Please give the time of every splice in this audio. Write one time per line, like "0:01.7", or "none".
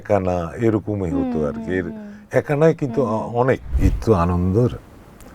0:03.7